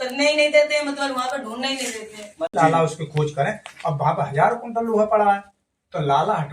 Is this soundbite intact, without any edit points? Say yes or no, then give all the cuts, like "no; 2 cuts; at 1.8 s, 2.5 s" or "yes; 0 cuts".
no; 1 cut; at 2.5 s